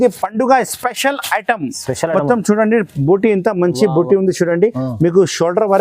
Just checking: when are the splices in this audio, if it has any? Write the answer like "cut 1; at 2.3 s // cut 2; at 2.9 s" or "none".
none